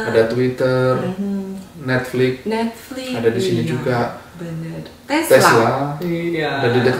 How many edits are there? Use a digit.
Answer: 0